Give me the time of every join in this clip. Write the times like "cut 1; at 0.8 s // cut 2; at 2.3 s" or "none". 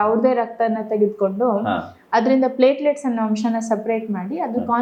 none